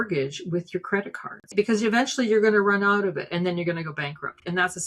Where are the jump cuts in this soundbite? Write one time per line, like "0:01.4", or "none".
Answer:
0:01.5